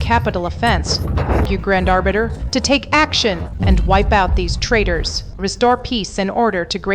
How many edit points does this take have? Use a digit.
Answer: 1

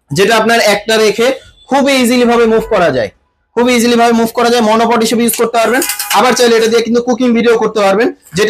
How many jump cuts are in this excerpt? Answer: 0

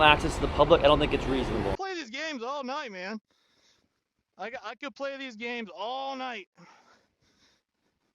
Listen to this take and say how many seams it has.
1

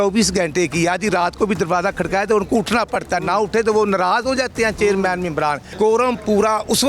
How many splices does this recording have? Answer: 1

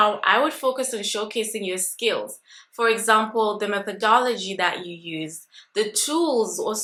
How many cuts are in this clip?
0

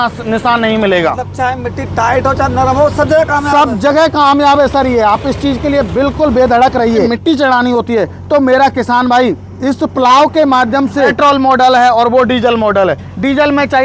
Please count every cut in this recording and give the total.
3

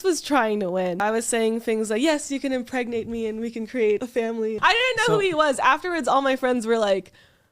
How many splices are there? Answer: 2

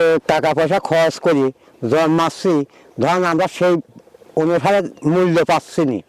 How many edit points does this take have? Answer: 0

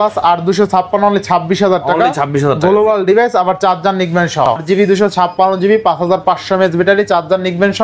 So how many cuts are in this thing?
1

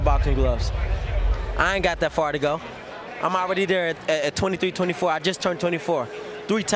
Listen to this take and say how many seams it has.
0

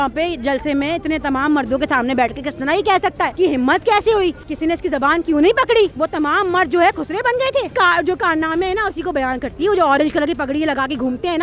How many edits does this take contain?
4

